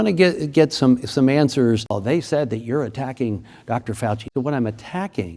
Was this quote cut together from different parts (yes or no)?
yes